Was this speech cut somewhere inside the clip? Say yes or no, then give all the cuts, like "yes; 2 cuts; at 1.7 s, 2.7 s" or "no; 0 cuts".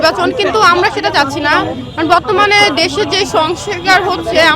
no; 0 cuts